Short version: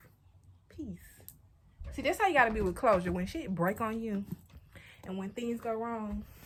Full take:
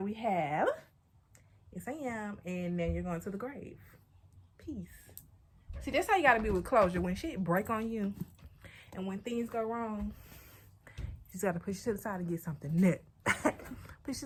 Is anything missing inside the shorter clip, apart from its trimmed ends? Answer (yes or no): no